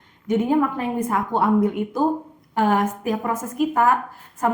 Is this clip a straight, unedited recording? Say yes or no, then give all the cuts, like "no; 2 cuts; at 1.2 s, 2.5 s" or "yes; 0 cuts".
yes; 0 cuts